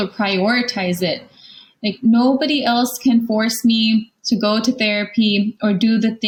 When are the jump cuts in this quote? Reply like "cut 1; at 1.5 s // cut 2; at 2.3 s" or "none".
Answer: none